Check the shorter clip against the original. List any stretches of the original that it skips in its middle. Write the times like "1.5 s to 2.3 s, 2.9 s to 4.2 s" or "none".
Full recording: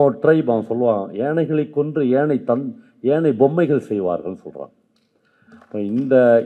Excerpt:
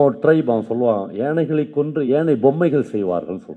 2.0 s to 3.0 s

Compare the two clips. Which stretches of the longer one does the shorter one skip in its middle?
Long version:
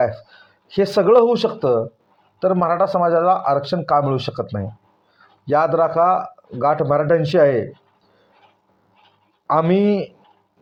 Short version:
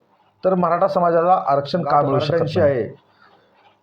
4.2 s to 7.0 s

